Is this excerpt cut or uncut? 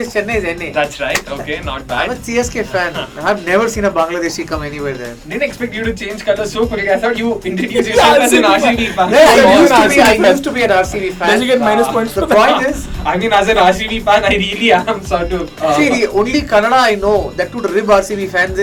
uncut